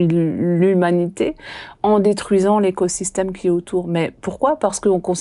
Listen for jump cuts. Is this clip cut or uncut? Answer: uncut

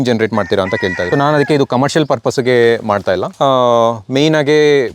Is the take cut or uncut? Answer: cut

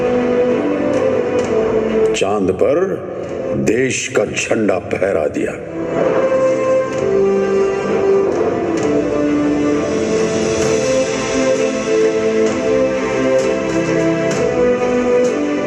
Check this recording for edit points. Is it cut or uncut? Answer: uncut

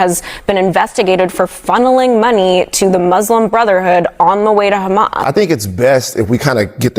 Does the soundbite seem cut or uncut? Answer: cut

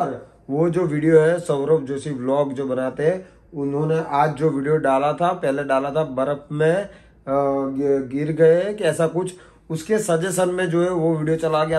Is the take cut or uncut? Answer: uncut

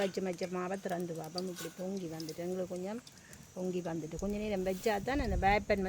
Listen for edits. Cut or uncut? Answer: uncut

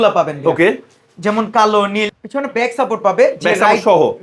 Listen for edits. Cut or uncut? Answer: cut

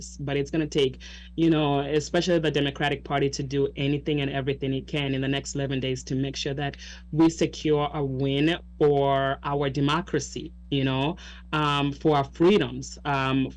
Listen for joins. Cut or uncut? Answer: uncut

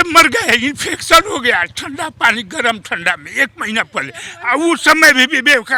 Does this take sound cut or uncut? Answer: uncut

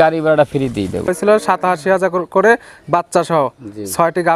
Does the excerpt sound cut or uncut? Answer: cut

